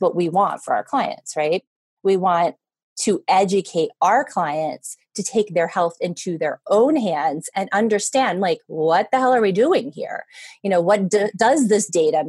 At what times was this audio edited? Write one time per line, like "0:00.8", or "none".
none

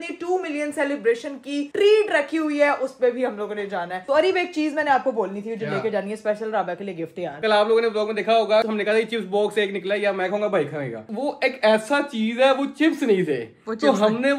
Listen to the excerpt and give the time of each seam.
0:04.0
0:07.4
0:08.6
0:11.0

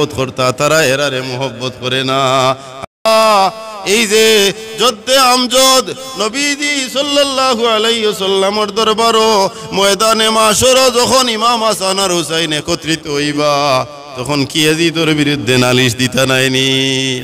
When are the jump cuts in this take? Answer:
0:03.0

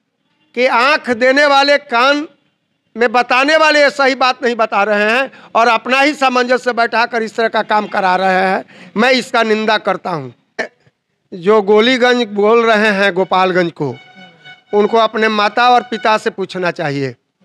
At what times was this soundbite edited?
0:10.8

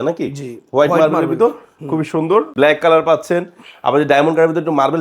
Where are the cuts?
0:02.5

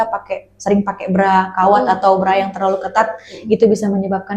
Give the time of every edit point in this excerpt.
none

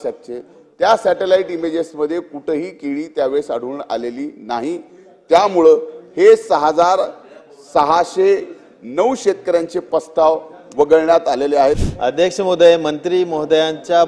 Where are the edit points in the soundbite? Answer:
0:11.9

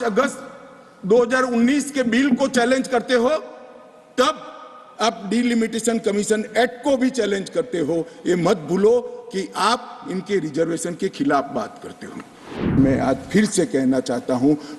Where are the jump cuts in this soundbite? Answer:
0:12.7

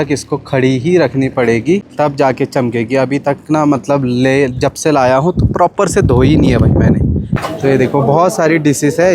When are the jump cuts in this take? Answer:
0:01.9
0:07.3

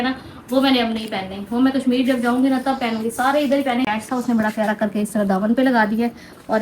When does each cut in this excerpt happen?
0:03.9

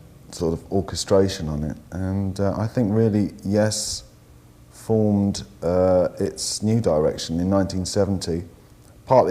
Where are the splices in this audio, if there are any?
0:02.8

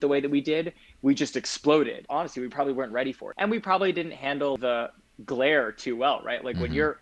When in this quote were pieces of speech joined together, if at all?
0:02.0
0:03.3
0:04.6

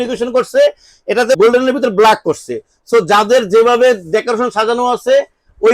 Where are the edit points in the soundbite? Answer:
0:01.3

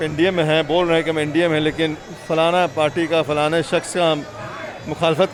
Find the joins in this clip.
none

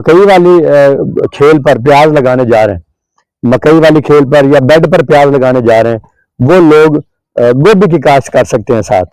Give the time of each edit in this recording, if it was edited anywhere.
none

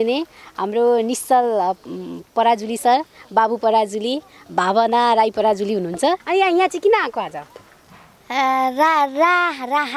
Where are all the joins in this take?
0:06.2

